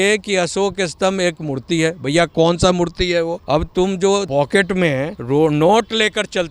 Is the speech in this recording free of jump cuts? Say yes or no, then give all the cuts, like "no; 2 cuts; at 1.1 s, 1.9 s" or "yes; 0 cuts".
no; 3 cuts; at 3.4 s, 4.3 s, 5.2 s